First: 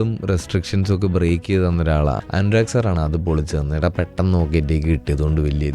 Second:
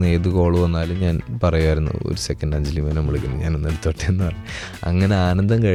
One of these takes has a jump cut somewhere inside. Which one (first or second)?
first